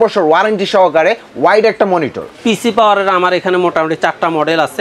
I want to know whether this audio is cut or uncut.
cut